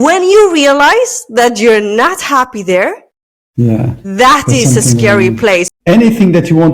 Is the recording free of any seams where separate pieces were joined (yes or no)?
no